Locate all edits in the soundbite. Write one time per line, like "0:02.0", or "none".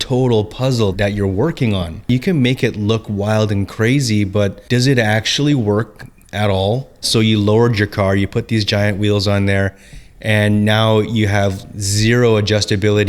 0:00.9
0:02.1
0:04.6
0:07.1